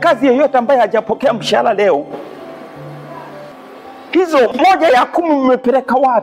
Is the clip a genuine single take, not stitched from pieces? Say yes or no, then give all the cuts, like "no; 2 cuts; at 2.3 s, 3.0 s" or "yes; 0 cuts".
no; 1 cut; at 4.5 s